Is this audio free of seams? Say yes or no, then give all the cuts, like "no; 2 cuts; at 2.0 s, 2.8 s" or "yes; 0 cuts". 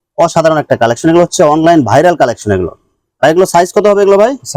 yes; 0 cuts